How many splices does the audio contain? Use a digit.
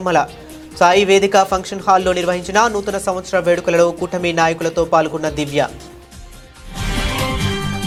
0